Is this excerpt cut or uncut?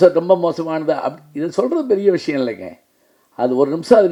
uncut